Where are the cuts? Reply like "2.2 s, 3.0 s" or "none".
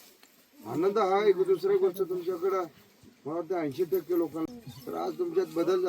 4.6 s